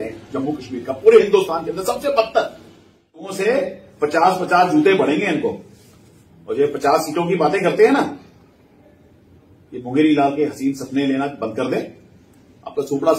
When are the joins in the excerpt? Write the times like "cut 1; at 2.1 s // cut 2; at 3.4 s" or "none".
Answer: cut 1; at 3.3 s